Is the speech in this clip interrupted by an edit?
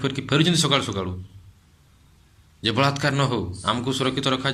no; 0 cuts

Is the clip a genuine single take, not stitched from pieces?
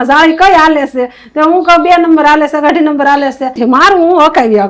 no; 1 cut; at 3.6 s

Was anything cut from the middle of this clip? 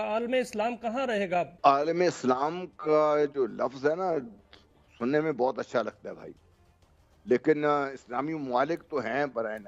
yes; 1 cut; at 1.5 s

